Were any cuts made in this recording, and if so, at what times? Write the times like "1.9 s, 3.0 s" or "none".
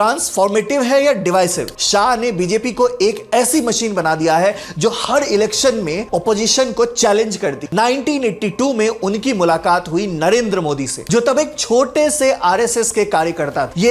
1.7 s, 7.7 s